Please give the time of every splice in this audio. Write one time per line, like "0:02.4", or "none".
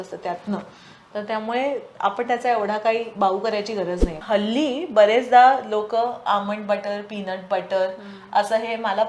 0:04.2